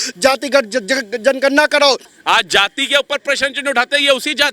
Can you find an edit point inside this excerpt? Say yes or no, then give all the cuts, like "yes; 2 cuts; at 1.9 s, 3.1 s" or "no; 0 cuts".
yes; 1 cut; at 2.1 s